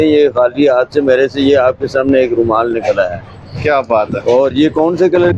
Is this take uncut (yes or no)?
yes